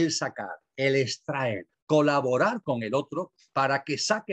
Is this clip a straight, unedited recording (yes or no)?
no